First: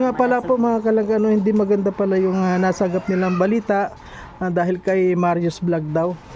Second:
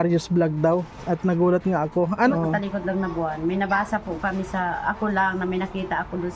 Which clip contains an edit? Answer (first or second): second